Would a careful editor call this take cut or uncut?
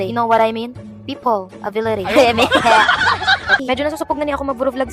cut